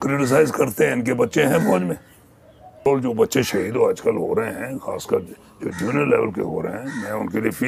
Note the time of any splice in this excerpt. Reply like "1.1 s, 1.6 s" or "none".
2.9 s

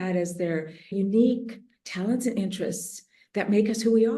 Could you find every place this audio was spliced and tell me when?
0.9 s

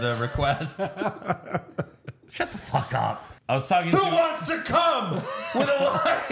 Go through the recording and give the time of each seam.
3.3 s

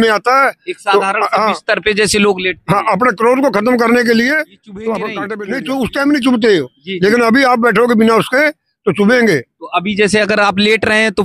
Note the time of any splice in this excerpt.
5.3 s

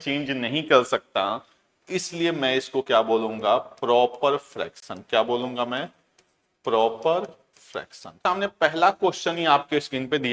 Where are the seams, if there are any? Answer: 8.2 s

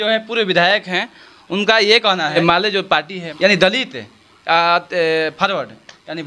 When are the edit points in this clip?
2.7 s

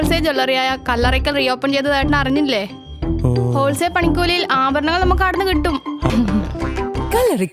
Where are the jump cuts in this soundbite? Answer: 6.1 s

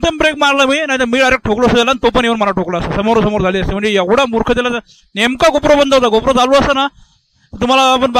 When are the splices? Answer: none

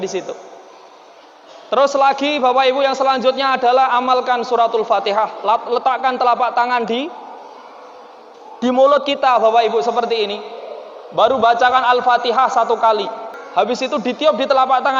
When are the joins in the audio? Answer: 13.3 s

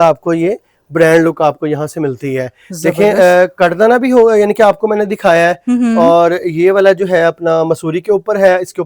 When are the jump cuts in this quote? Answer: none

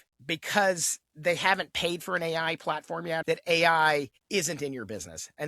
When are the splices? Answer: 3.2 s

